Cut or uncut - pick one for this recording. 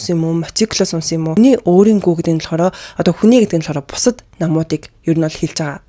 cut